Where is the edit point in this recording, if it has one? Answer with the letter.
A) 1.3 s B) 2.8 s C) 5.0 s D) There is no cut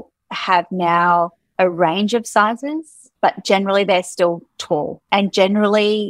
C